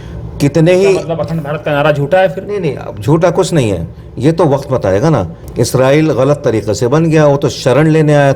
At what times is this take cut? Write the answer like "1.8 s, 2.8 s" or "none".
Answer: 5.4 s